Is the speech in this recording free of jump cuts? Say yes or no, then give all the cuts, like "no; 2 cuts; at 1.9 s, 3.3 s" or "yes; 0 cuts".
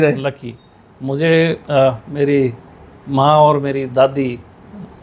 yes; 0 cuts